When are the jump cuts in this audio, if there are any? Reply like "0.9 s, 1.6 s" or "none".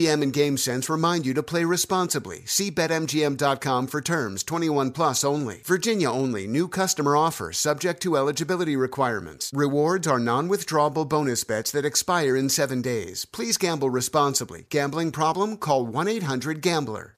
none